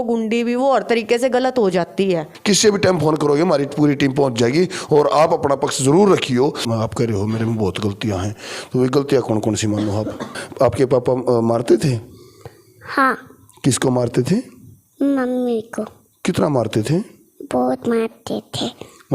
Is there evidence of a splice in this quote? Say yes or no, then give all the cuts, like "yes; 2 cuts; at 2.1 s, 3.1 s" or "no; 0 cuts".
yes; 3 cuts; at 2.3 s, 6.6 s, 10.4 s